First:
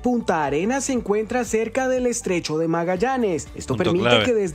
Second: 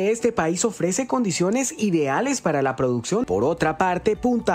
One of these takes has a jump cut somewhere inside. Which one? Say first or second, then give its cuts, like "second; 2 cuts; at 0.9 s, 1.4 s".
second; 1 cut; at 3.2 s